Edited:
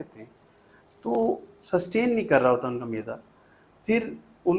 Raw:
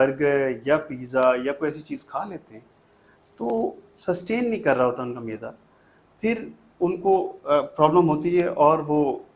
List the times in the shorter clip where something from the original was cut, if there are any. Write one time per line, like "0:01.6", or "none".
none

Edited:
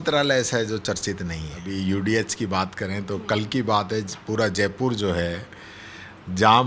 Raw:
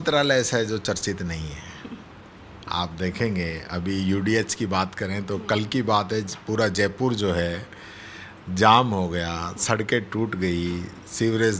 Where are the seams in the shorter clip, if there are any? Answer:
0:01.5

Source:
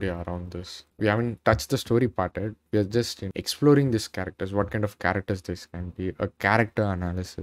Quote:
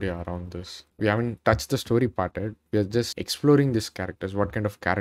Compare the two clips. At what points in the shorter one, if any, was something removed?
0:03.2

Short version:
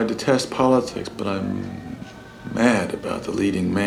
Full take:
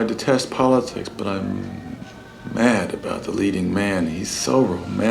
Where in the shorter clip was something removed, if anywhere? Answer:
none

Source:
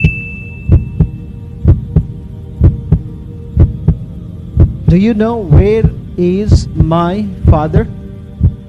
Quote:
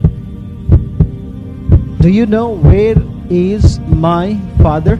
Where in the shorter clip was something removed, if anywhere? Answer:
0:01.5

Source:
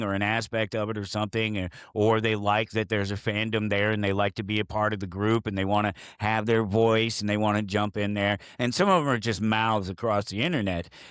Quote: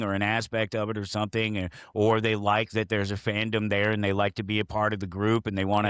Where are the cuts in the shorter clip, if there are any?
none

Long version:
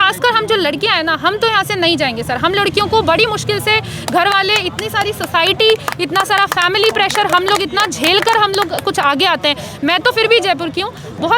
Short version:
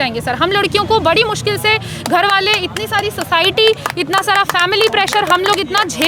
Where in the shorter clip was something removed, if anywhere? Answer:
none

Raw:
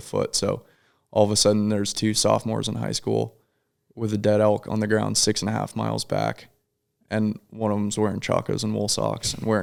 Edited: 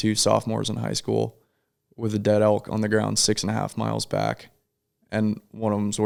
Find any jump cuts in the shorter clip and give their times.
none

